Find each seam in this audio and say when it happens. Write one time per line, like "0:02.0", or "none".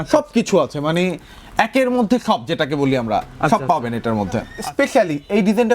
0:04.5